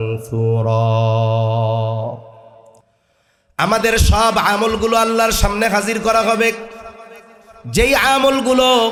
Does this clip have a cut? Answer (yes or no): no